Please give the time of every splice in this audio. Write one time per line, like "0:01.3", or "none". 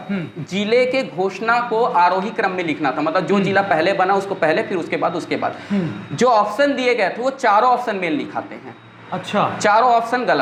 none